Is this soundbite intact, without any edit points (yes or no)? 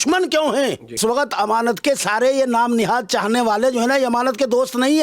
no